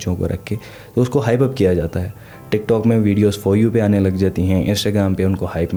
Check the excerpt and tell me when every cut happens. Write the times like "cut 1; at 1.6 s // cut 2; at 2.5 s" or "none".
none